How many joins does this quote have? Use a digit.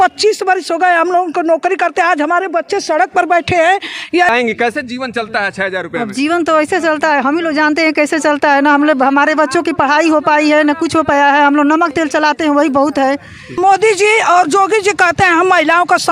2